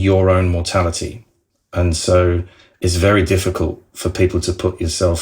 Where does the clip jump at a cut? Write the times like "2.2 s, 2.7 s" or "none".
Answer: 1.3 s

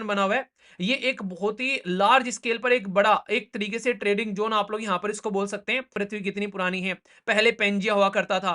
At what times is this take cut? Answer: 5.9 s

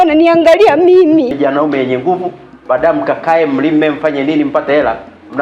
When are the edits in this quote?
1.3 s

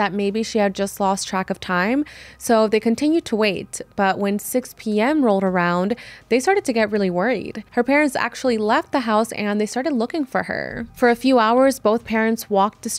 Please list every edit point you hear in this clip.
7.6 s

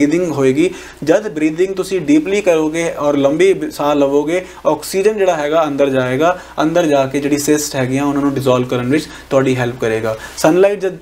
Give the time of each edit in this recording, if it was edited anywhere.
none

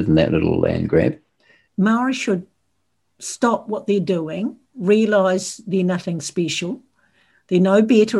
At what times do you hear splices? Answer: 1.6 s

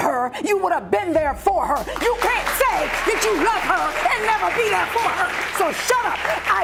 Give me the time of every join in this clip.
none

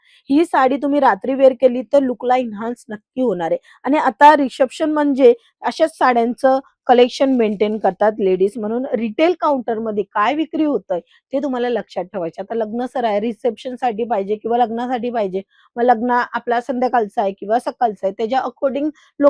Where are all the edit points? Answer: none

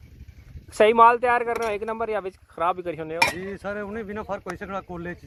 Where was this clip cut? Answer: none

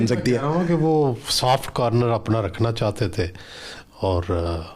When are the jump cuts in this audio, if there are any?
none

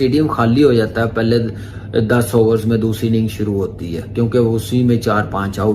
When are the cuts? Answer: 3.8 s

